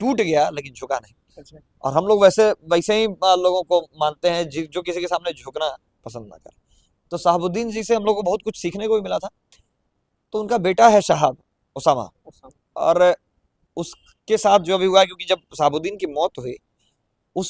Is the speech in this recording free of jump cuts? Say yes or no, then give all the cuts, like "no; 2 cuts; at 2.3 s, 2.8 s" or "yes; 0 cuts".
yes; 0 cuts